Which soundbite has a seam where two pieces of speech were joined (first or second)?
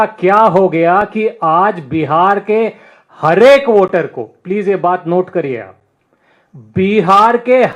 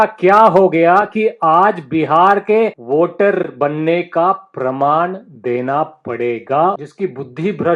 second